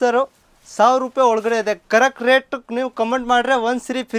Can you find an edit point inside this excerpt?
no; 0 cuts

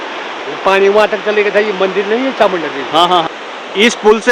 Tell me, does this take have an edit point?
yes; 1 cut; at 3.3 s

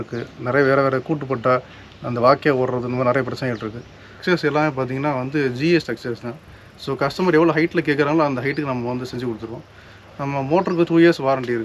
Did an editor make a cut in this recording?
yes; 1 cut; at 4.2 s

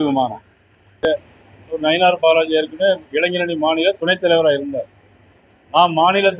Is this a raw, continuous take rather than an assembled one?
no; 1 cut; at 1.0 s

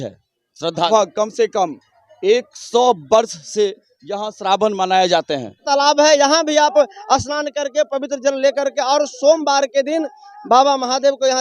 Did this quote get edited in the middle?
yes; 2 cuts; at 0.9 s, 5.6 s

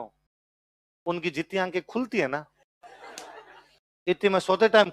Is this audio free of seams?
yes; 0 cuts

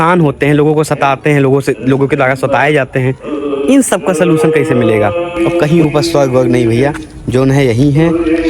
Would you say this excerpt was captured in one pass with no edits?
no; 1 cut; at 5.3 s

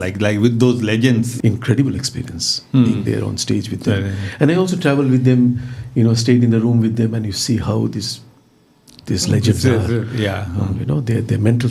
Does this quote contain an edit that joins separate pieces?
yes; 1 cut; at 1.3 s

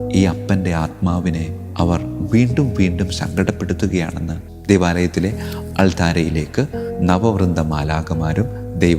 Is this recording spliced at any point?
yes; 1 cut; at 4.4 s

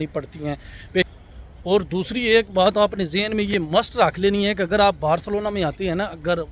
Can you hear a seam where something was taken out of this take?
yes; 1 cut; at 1.1 s

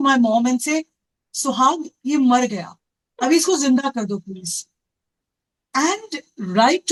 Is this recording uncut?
yes; 0 cuts

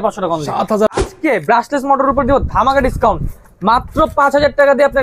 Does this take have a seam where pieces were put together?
yes; 1 cut; at 1.0 s

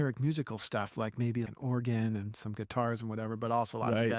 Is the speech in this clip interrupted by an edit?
yes; 1 cut; at 1.5 s

